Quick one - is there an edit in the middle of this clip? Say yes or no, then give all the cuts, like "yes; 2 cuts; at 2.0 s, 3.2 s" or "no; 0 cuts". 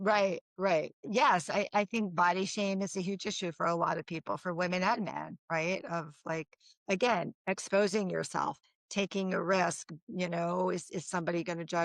yes; 1 cut; at 1.1 s